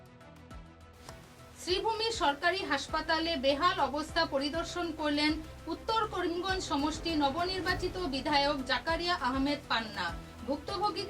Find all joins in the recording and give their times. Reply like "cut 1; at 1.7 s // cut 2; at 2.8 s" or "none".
cut 1; at 0.9 s